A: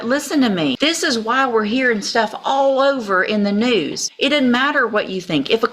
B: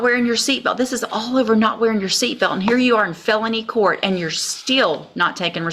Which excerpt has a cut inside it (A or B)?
A